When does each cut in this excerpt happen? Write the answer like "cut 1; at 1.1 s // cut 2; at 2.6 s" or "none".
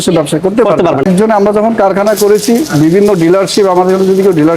cut 1; at 1.1 s